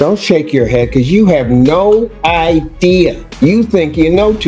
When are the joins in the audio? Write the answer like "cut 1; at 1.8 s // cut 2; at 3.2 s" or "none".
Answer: cut 1; at 3.2 s

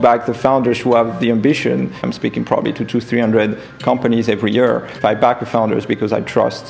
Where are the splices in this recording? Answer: cut 1; at 2.0 s // cut 2; at 4.9 s

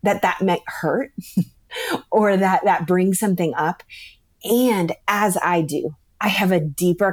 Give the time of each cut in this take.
none

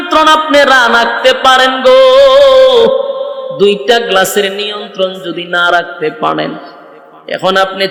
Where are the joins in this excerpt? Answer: none

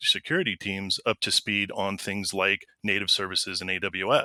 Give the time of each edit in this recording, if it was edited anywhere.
none

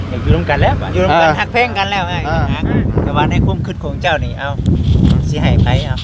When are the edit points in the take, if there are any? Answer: cut 1; at 2.2 s

